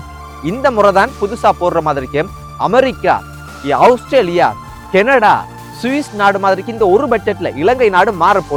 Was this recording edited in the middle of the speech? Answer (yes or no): no